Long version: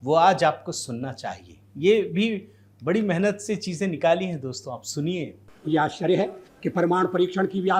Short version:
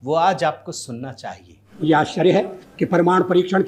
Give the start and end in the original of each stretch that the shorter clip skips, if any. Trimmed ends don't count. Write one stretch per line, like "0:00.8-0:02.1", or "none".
0:01.6-0:05.4